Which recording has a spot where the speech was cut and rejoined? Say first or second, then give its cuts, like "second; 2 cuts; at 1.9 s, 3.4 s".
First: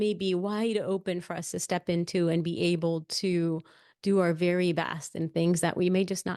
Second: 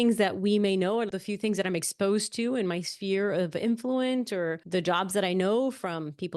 second; 2 cuts; at 1.1 s, 4.6 s